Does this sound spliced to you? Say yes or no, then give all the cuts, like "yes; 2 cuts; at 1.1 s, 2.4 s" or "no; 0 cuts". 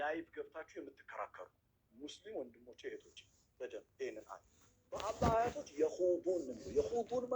yes; 1 cut; at 5.1 s